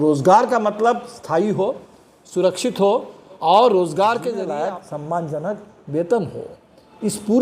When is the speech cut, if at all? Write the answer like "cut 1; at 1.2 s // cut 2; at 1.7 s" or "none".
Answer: cut 1; at 4.4 s